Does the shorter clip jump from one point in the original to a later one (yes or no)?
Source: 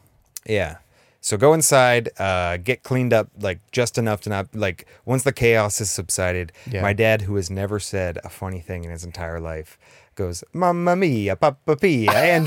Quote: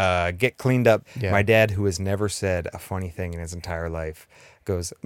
yes